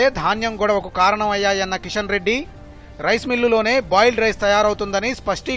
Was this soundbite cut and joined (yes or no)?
no